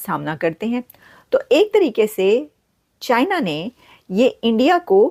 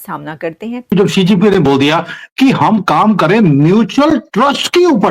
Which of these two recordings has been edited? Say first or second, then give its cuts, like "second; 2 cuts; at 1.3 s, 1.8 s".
second; 1 cut; at 0.9 s